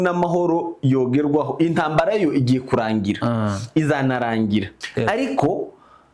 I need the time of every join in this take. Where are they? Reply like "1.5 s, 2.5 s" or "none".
4.8 s